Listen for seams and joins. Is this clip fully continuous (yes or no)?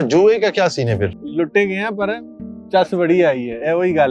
no